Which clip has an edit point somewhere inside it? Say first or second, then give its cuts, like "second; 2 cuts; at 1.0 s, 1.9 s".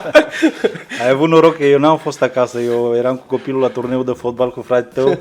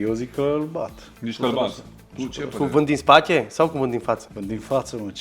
second; 2 cuts; at 1.0 s, 4.3 s